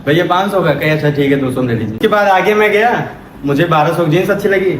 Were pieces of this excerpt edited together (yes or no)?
yes